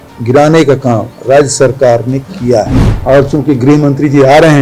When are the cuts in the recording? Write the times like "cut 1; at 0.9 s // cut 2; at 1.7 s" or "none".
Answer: cut 1; at 2.8 s